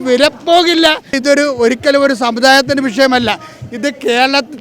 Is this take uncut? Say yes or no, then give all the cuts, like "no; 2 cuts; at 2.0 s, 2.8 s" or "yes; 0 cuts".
no; 1 cut; at 1.2 s